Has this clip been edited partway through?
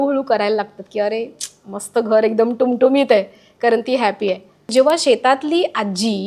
yes; 1 cut; at 4.7 s

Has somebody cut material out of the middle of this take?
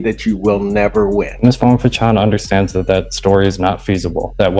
yes; 1 cut; at 1.3 s

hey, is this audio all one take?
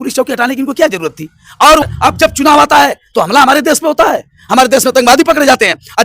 no; 1 cut; at 1.8 s

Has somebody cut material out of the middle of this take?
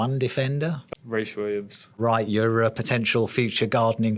yes; 2 cuts; at 0.8 s, 1.8 s

